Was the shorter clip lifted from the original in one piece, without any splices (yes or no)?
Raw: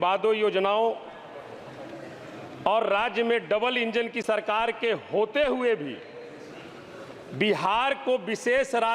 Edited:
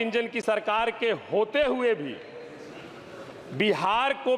yes